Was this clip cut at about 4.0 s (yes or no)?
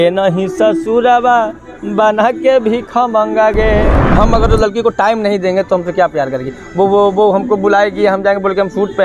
yes